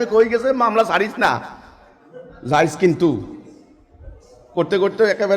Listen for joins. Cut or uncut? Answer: uncut